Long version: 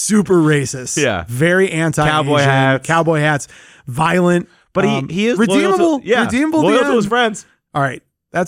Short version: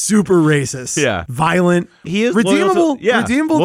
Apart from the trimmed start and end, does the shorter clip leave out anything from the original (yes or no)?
yes